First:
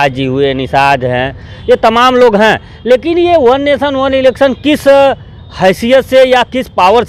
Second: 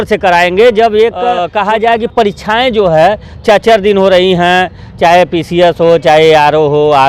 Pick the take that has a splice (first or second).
second